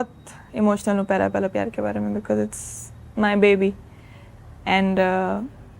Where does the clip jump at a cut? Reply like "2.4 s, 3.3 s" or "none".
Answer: none